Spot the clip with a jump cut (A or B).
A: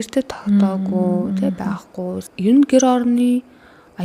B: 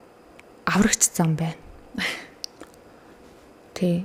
A